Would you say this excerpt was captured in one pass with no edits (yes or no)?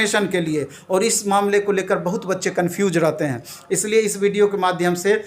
yes